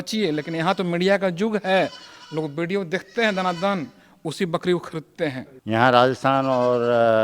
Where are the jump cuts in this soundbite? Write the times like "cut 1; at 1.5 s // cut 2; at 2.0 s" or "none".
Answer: cut 1; at 5.5 s